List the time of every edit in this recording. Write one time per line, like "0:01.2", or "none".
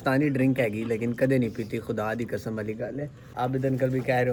none